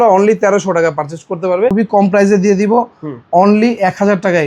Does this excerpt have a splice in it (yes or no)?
yes